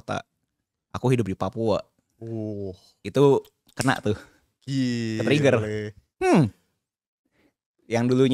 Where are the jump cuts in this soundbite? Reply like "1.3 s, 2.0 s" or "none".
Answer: none

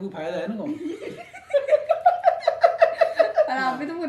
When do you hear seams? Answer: none

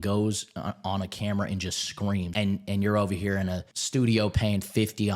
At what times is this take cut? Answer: 2.3 s, 3.7 s

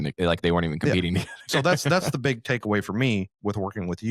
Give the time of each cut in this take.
none

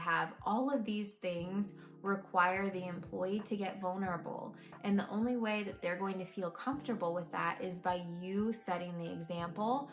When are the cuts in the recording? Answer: none

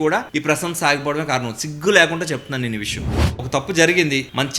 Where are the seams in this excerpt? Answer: 3.0 s

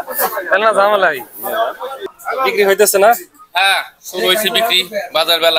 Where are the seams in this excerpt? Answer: 2.1 s

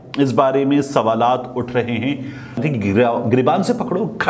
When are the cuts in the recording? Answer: 2.6 s

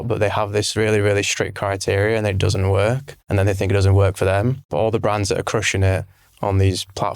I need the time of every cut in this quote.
3.1 s, 4.6 s

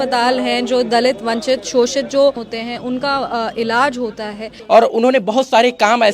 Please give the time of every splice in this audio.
2.4 s, 4.5 s

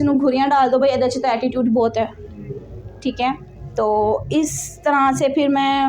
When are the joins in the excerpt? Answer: none

